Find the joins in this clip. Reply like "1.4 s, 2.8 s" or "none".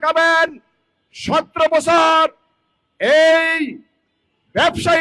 none

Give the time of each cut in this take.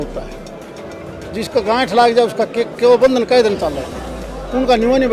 none

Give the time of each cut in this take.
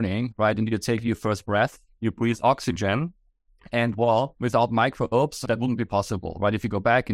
4.3 s, 5.4 s

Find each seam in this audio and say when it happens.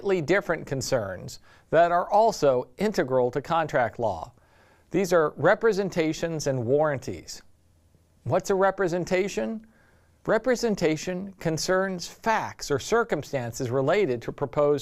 3.7 s

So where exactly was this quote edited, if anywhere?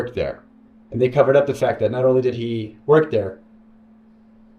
none

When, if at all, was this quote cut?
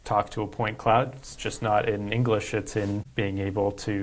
3.1 s

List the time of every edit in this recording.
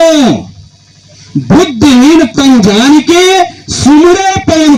none

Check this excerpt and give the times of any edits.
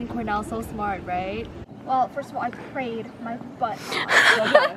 1.6 s

